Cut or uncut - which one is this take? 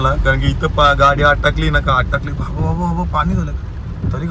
uncut